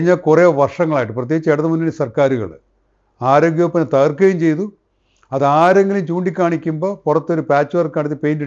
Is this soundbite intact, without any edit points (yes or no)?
yes